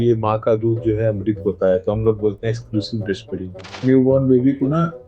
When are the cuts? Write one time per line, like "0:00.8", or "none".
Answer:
0:03.8